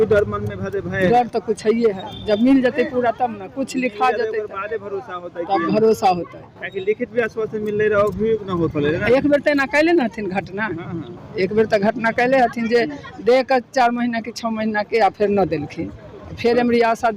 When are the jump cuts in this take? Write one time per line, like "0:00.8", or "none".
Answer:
none